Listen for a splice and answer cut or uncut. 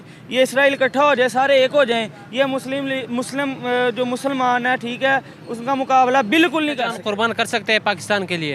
cut